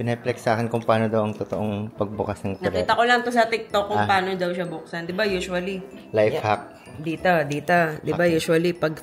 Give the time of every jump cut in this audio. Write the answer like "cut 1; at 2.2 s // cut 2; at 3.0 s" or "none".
none